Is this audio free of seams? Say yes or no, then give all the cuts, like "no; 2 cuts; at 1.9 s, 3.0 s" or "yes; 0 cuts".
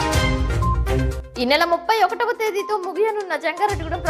no; 1 cut; at 0.9 s